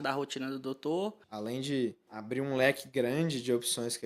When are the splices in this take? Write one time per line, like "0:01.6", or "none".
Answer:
0:01.3
0:02.1